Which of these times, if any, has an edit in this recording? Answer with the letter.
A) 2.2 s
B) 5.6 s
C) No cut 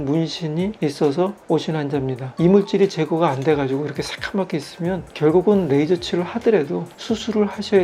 A